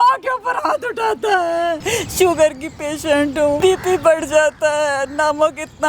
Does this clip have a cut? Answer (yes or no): yes